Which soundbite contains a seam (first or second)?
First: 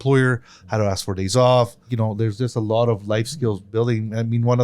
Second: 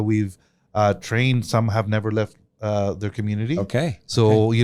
first